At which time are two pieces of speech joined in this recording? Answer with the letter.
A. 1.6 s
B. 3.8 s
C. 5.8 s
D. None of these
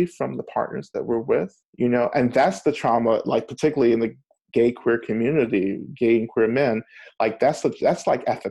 A